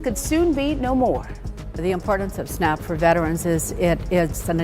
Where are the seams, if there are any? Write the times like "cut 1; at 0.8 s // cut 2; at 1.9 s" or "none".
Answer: cut 1; at 1.9 s

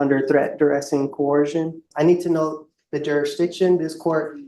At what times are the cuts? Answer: cut 1; at 1.9 s

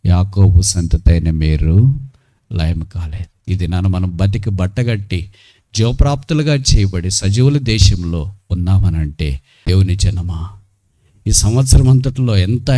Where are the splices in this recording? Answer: cut 1; at 9.5 s

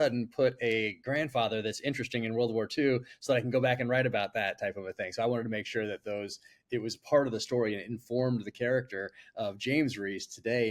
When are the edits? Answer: none

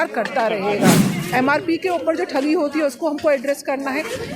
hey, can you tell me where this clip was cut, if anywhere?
cut 1; at 1.2 s

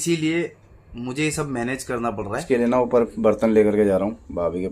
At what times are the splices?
cut 1; at 2.4 s

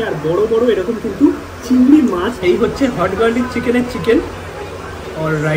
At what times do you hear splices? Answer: cut 1; at 2.3 s

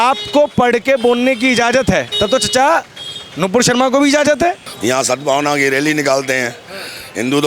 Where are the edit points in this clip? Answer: cut 1; at 2.1 s // cut 2; at 4.7 s

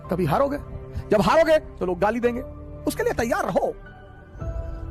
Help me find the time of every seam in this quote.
none

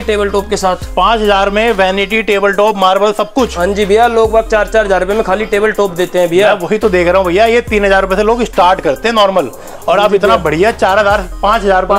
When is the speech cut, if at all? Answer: none

